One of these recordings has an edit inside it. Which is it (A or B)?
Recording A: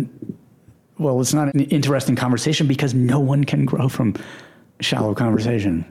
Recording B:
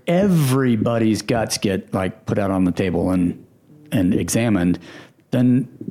A